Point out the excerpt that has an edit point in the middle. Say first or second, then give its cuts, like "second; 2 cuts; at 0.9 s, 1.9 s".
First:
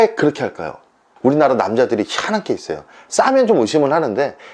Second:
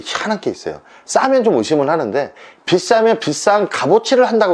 first; 1 cut; at 1.1 s